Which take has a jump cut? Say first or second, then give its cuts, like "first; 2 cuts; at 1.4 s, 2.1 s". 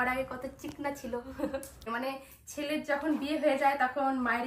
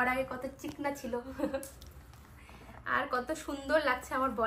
first; 1 cut; at 1.9 s